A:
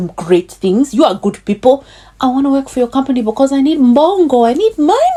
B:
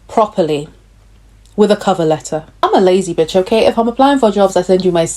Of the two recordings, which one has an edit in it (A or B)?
B